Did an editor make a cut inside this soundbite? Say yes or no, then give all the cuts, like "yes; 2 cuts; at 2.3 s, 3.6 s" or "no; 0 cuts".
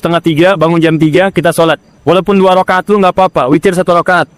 no; 0 cuts